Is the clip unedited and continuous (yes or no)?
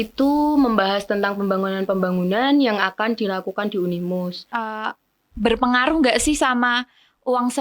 no